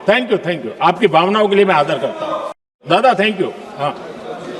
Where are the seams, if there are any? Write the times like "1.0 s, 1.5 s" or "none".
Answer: 2.8 s